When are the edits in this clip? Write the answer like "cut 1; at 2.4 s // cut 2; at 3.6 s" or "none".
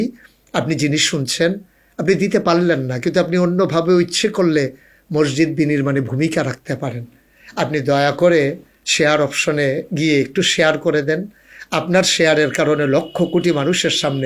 none